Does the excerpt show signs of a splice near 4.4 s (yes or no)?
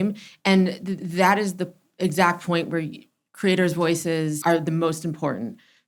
yes